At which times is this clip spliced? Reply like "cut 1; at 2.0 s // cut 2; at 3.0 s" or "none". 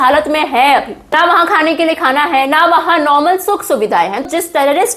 cut 1; at 1.1 s // cut 2; at 4.2 s